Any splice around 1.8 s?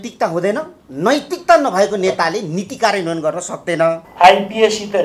no; 1 cut; at 4.1 s

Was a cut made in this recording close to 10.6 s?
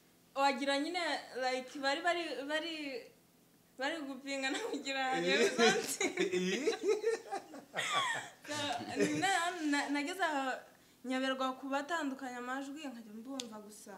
no; 0 cuts

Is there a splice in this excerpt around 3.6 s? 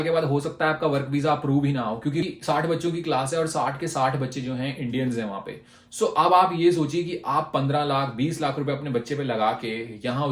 no; 1 cut; at 2.2 s

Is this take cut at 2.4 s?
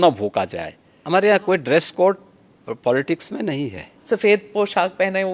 no; 2 cuts; at 1.0 s, 4.0 s

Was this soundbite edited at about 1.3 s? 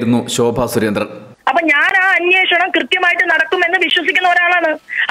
yes; 1 cut; at 1.3 s

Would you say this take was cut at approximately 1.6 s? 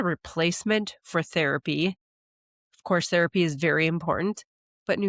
no; 0 cuts

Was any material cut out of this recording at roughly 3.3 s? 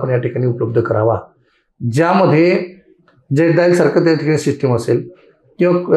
no; 0 cuts

